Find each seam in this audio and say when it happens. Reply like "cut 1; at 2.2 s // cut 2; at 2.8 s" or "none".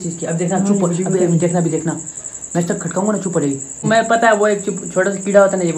cut 1; at 3.8 s